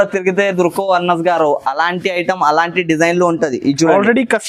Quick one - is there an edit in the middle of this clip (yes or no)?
no